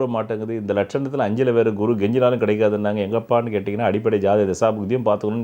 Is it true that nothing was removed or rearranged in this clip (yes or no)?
yes